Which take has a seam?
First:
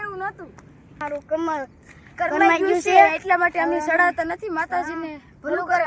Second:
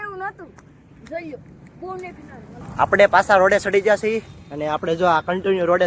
first; 1 cut; at 1.0 s

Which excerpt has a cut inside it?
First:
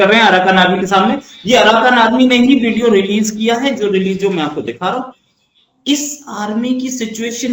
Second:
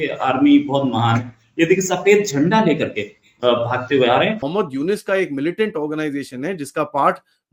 second; 1 cut; at 4.4 s

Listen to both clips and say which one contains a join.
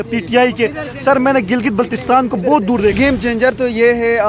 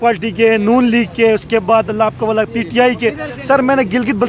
first; 1 cut; at 2.9 s

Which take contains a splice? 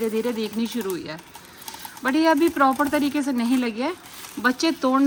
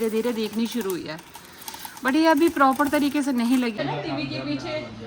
second; 1 cut; at 3.8 s

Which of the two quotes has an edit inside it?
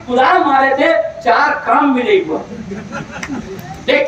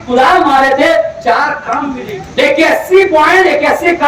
second; 1 cut; at 1.8 s

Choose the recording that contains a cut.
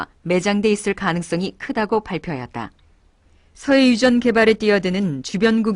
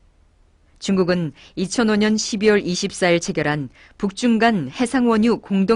first; 1 cut; at 1.2 s

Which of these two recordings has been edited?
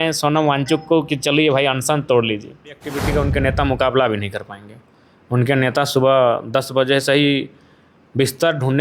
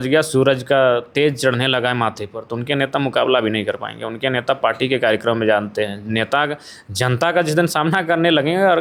first; 1 cut; at 2.9 s

